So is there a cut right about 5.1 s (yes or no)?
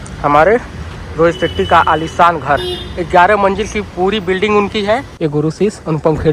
yes